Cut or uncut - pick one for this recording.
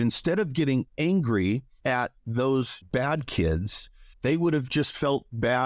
cut